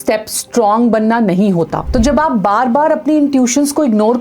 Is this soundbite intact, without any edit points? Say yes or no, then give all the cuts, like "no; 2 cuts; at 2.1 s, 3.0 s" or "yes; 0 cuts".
no; 1 cut; at 1.8 s